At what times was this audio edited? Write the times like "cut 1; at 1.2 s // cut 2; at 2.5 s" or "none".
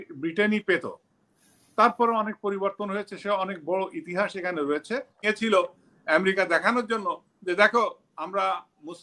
cut 1; at 5.1 s